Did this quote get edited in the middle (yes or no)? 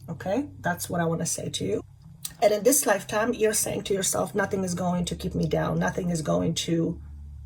no